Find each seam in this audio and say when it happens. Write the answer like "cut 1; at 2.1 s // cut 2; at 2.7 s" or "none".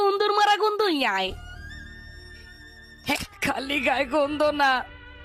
cut 1; at 3.2 s